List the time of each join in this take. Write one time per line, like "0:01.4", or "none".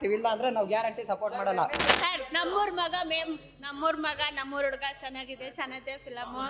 0:02.0

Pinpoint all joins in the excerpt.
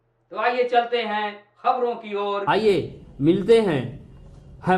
0:02.4

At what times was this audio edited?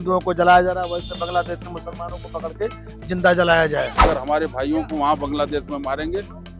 0:04.0

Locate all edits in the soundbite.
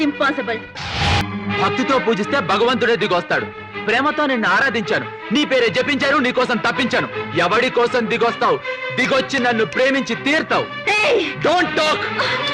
0:01.2

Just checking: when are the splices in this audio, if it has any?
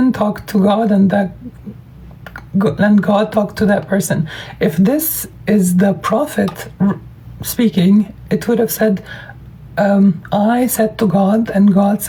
none

